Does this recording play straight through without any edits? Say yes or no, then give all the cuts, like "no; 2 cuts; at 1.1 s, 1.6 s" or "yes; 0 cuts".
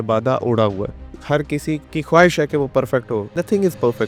no; 3 cuts; at 1.1 s, 1.8 s, 3.3 s